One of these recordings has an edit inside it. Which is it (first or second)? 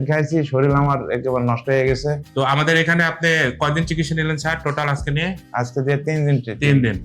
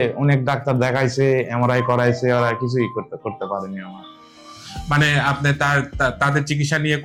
first